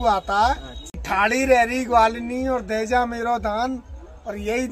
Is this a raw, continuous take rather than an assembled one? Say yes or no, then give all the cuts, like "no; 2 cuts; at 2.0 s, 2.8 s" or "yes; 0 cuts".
no; 1 cut; at 1.0 s